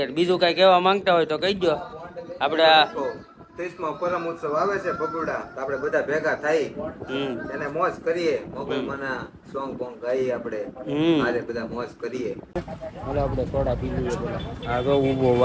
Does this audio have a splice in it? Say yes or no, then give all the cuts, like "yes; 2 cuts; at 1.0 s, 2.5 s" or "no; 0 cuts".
yes; 1 cut; at 12.6 s